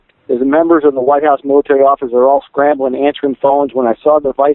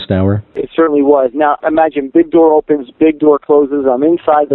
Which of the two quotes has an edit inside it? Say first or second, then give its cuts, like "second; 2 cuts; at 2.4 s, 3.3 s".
second; 1 cut; at 1.6 s